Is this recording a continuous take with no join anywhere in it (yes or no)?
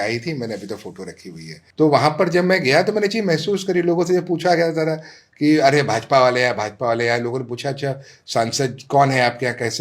no